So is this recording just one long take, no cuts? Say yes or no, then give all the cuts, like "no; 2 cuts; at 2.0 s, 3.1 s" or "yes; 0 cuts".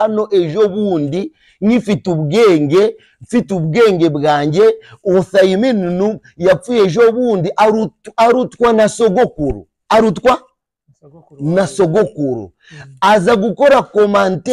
yes; 0 cuts